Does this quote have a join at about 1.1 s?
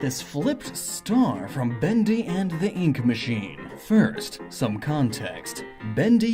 yes; 1 cut; at 1.1 s

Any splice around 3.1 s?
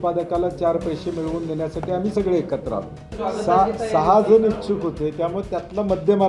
yes; 1 cut; at 3.1 s

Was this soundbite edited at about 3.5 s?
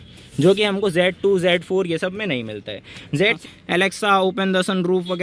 yes; 1 cut; at 3.5 s

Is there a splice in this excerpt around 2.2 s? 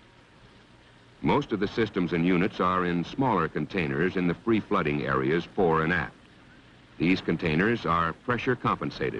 no; 1 cut; at 7.3 s

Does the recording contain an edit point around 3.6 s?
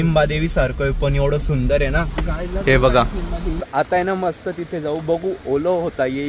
yes; 1 cut; at 3.6 s

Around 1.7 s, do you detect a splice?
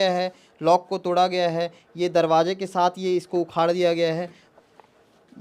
no; 1 cut; at 4.4 s

